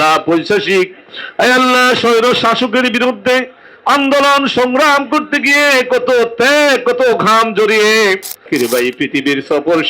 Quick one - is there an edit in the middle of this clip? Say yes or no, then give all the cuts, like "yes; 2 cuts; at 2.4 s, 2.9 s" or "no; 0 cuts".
yes; 1 cut; at 8.5 s